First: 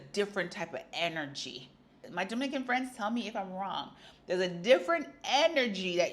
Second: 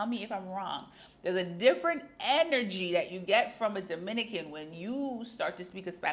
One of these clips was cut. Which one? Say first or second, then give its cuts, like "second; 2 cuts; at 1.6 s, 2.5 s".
first; 1 cut; at 2.0 s